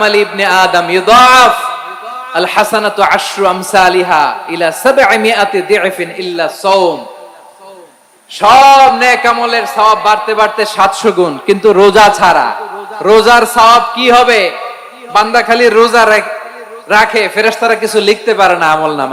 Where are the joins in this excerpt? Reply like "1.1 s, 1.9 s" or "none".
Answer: none